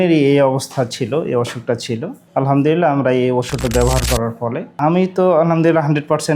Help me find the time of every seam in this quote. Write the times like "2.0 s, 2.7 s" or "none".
none